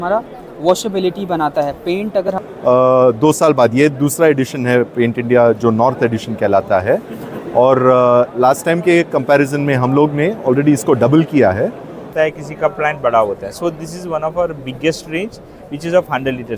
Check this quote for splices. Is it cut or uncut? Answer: cut